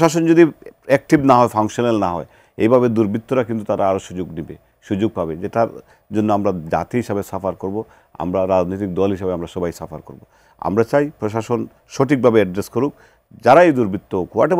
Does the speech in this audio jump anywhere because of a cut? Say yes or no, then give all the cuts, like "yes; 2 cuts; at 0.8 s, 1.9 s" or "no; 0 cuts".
no; 0 cuts